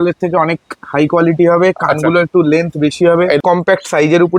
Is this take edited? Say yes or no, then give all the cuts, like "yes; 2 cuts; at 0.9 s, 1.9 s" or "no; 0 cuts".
yes; 1 cut; at 3.4 s